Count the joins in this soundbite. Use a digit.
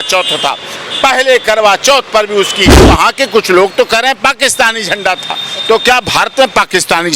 1